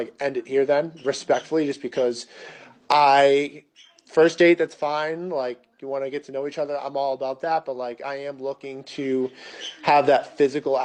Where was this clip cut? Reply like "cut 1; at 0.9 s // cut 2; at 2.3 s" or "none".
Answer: none

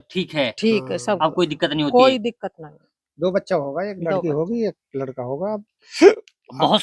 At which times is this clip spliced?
none

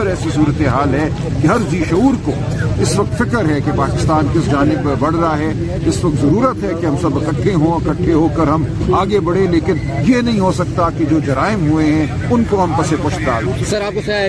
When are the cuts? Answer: none

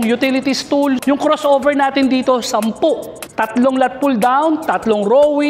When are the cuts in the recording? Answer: cut 1; at 1.0 s // cut 2; at 3.2 s

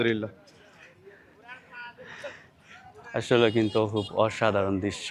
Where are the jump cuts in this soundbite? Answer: none

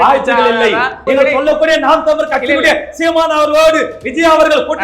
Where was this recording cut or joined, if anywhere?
cut 1; at 1.0 s

